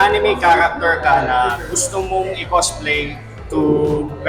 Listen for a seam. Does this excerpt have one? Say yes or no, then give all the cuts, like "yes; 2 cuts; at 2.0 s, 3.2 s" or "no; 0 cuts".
no; 0 cuts